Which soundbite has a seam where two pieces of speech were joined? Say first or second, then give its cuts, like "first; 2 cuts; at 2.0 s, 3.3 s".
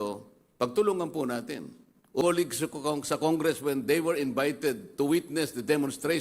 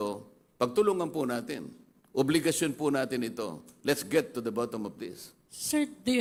first; 1 cut; at 2.2 s